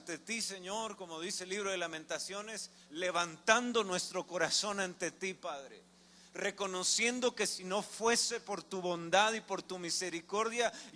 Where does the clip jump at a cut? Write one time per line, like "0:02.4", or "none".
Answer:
none